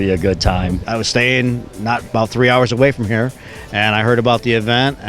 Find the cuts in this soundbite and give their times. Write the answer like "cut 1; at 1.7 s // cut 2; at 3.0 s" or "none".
cut 1; at 0.9 s